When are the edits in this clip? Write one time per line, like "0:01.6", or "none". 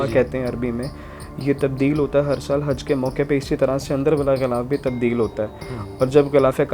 none